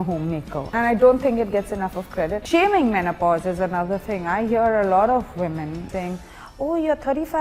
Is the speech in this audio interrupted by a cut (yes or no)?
yes